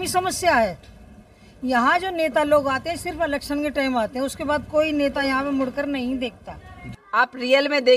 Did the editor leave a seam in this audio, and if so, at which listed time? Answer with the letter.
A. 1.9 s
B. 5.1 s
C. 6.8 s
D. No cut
C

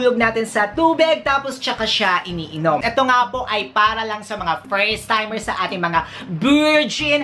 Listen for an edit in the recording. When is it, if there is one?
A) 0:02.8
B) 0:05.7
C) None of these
A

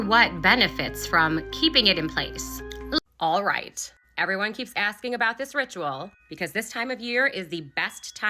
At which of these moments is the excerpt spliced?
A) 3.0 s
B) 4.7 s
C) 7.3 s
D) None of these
A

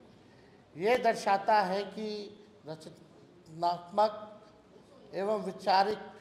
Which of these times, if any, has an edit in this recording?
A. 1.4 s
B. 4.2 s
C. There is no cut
C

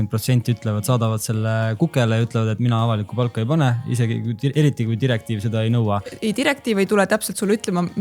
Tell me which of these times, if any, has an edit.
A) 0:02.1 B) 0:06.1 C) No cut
B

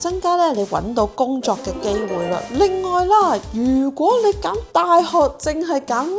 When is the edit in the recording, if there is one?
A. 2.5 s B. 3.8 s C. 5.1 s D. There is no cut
A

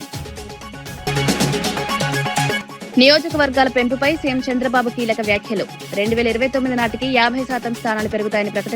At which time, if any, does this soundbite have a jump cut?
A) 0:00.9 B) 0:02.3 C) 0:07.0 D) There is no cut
A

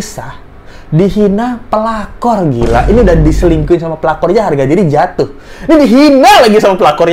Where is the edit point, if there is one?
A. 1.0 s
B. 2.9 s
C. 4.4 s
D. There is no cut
D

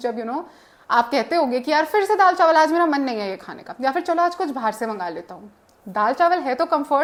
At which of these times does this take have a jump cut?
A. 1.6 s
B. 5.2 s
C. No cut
C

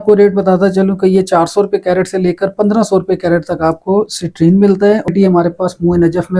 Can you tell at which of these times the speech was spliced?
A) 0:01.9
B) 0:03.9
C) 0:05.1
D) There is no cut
C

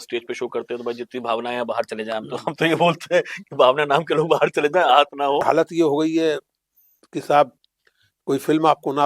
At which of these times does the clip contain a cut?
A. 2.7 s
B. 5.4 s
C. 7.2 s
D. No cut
B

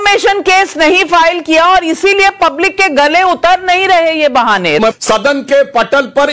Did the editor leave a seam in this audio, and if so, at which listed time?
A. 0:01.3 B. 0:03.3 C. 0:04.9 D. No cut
C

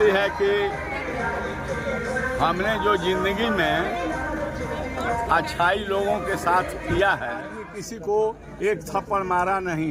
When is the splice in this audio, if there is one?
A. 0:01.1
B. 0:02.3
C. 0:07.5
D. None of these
C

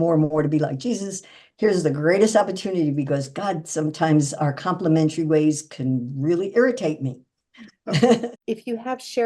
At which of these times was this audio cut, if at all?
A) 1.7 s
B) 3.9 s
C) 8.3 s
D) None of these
C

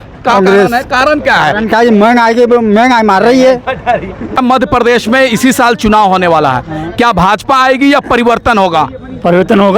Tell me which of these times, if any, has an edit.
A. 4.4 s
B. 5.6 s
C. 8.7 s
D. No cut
A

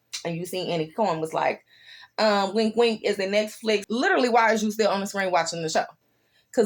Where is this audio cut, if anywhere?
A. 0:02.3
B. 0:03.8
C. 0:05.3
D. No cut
B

